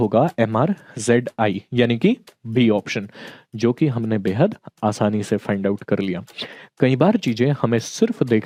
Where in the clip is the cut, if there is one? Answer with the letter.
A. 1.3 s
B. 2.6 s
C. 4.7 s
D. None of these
D